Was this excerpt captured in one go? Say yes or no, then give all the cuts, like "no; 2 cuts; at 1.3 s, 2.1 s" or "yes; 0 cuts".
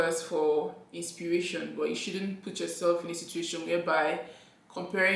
yes; 0 cuts